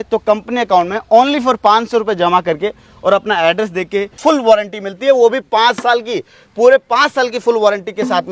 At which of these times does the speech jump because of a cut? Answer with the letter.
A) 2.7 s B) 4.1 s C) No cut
B